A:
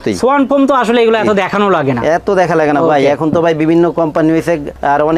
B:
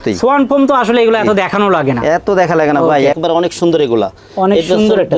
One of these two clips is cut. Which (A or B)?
B